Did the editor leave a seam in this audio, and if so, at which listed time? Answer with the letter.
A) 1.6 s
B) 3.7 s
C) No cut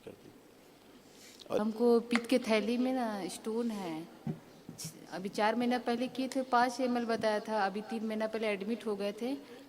A